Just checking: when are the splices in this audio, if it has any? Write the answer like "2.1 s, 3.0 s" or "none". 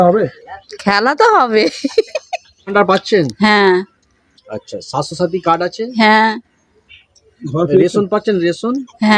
none